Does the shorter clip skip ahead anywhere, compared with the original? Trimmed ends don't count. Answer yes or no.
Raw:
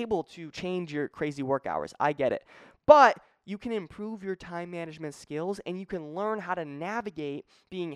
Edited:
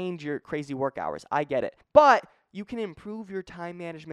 yes